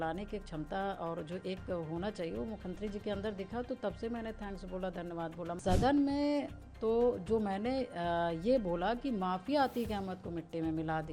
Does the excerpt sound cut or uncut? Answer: cut